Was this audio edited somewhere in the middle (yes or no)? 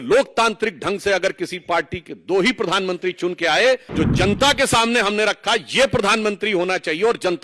yes